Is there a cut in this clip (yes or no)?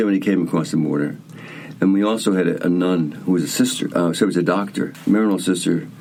no